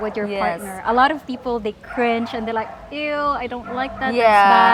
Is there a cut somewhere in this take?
no; 0 cuts

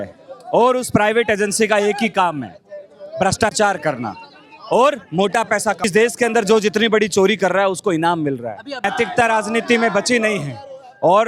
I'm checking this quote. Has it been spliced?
yes; 2 cuts; at 5.8 s, 8.8 s

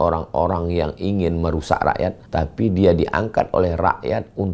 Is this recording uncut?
no; 1 cut; at 2.2 s

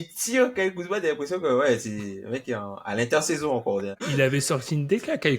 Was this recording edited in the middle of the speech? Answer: yes; 1 cut; at 4.0 s

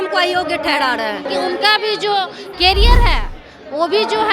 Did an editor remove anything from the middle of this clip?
yes; 1 cut; at 1.2 s

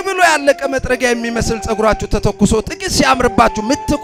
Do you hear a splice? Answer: no; 0 cuts

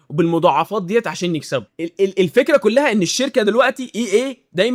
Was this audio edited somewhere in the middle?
no; 0 cuts

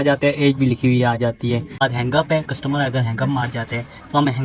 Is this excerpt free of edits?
no; 1 cut; at 1.8 s

